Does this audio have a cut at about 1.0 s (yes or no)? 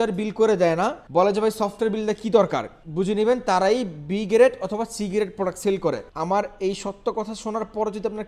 yes